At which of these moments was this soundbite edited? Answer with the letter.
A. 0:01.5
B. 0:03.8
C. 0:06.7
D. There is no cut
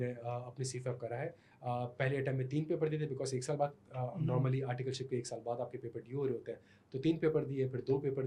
D